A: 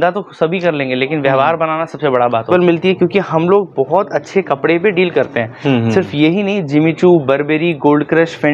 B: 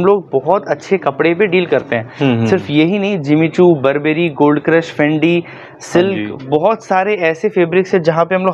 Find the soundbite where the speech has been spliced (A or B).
A